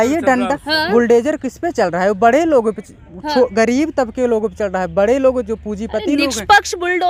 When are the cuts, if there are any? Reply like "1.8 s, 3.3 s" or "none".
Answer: none